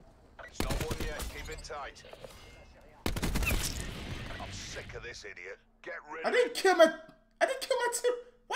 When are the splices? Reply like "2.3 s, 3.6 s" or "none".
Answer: none

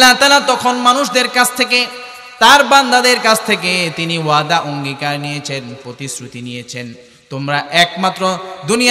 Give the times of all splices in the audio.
none

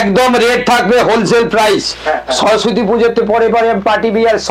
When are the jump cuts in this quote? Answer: none

